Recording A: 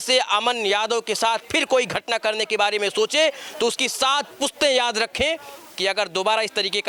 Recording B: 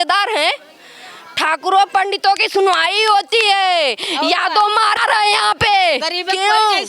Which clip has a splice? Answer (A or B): B